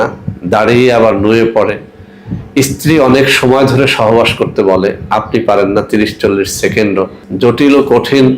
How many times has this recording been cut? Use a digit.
1